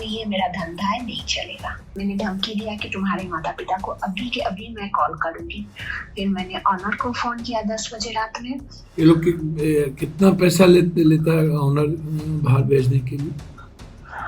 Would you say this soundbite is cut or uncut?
cut